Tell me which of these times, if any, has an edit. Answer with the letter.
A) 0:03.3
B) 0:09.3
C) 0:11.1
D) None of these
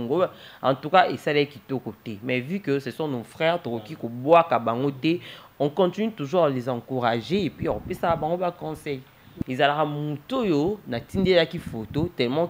B